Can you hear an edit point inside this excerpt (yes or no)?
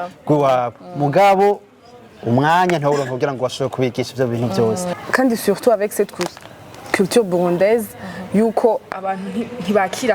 yes